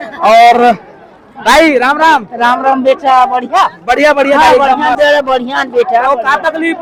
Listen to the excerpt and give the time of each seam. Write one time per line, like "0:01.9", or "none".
none